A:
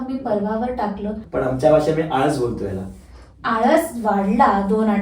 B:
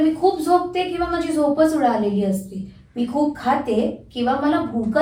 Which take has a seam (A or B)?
A